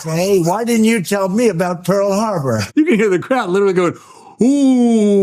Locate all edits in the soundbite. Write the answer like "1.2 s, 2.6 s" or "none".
2.6 s

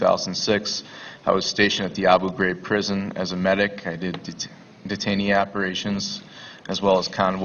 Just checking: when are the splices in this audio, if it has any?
5.7 s

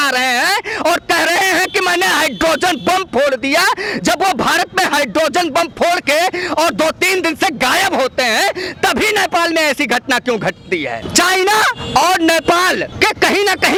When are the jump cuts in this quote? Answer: none

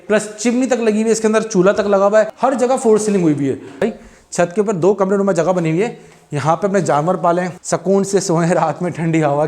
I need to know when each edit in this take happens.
2.3 s, 3.8 s, 7.6 s

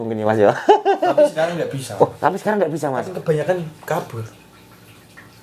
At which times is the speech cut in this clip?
none

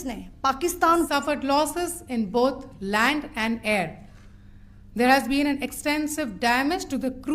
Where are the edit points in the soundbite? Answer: 1.1 s

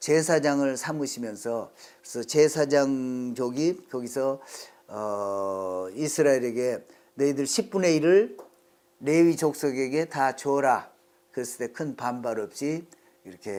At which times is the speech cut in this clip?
none

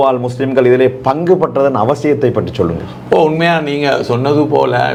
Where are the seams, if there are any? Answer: none

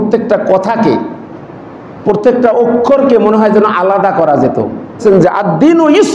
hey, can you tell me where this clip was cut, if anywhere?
5.0 s

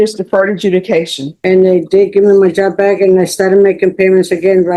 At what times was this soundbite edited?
1.2 s

